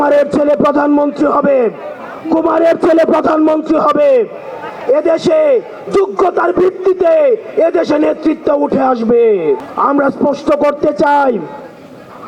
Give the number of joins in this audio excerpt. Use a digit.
0